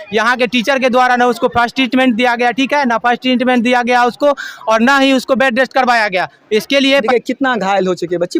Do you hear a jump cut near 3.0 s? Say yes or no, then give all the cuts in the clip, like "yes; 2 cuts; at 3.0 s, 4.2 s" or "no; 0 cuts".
no; 1 cut; at 7.1 s